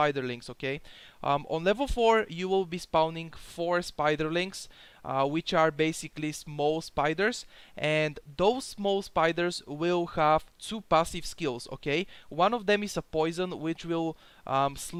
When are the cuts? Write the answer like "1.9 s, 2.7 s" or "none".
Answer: none

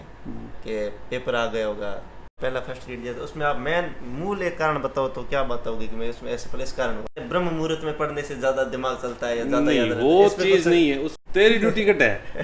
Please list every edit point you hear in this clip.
2.3 s, 7.2 s, 11.2 s

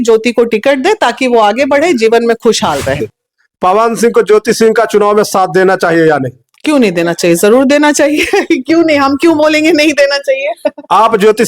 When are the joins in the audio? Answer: 2.9 s

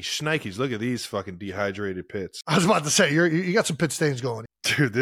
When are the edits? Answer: none

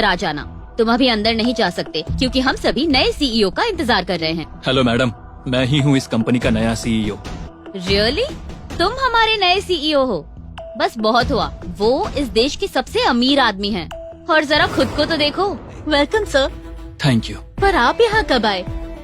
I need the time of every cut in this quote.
4.5 s, 7.4 s, 15.7 s

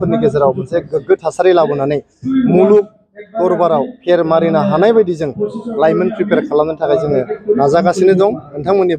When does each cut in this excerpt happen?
none

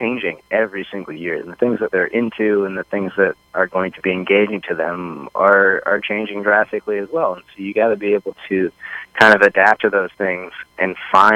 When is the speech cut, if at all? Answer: none

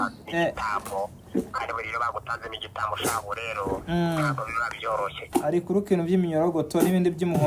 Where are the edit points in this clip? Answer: 5.2 s

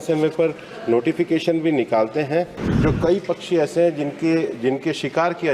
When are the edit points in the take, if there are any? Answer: 2.6 s

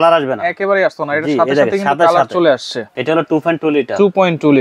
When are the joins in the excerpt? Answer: 2.9 s

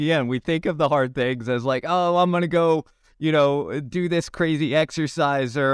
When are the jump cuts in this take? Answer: none

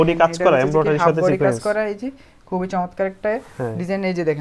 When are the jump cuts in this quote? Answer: none

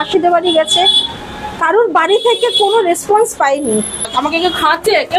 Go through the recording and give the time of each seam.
4.1 s

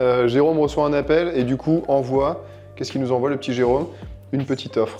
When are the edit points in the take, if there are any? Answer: none

